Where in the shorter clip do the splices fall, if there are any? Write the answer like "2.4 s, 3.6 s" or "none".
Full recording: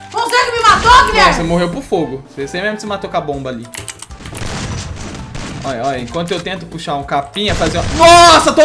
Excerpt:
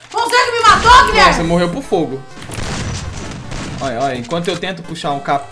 2.3 s